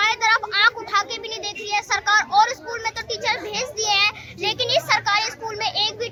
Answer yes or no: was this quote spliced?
no